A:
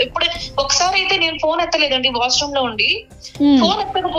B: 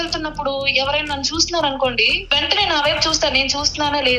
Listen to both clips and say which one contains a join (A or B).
B